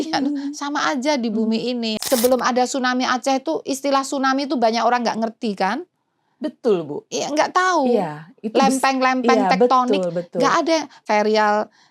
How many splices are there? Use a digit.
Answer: 2